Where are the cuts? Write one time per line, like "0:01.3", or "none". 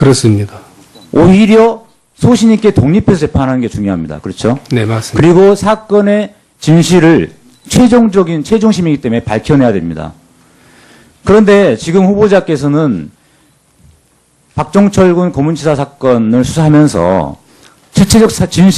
0:10.6